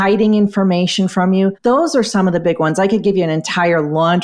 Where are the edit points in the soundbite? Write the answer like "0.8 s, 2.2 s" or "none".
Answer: 1.6 s